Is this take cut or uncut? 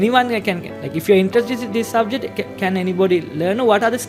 uncut